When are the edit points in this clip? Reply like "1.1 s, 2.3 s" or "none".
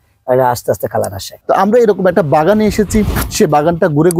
1.2 s